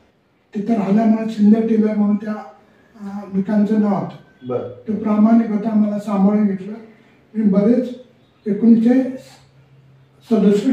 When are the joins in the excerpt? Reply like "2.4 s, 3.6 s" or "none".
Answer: none